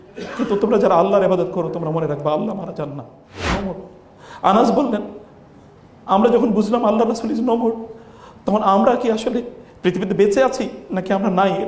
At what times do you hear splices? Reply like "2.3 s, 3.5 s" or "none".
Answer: 3.5 s